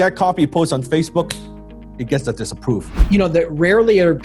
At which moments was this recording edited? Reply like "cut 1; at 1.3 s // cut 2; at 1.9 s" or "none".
cut 1; at 3.0 s

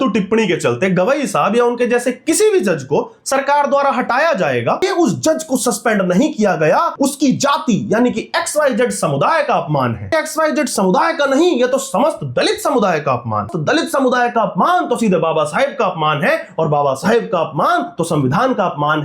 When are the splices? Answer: cut 1; at 4.8 s // cut 2; at 6.9 s // cut 3; at 10.1 s // cut 4; at 13.5 s

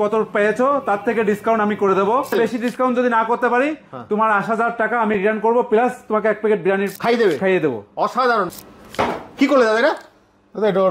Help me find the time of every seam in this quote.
cut 1; at 2.3 s // cut 2; at 6.9 s // cut 3; at 8.5 s

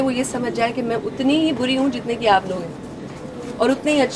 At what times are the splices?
none

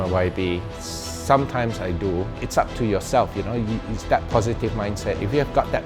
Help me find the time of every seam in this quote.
cut 1; at 2.4 s

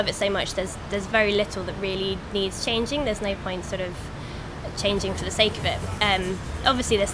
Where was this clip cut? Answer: none

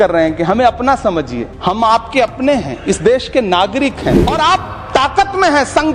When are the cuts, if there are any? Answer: cut 1; at 1.4 s // cut 2; at 4.2 s

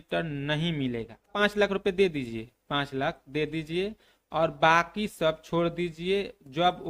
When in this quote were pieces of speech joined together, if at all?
cut 1; at 1.3 s

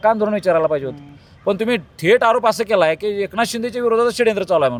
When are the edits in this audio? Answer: none

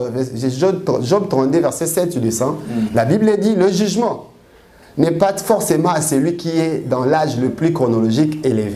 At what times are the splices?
none

